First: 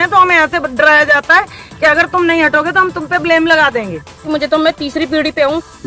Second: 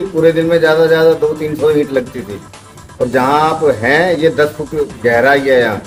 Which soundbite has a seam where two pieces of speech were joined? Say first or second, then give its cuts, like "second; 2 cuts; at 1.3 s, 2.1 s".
first; 1 cut; at 4.2 s